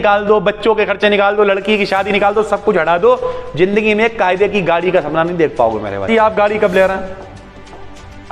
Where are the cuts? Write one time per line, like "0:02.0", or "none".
0:06.1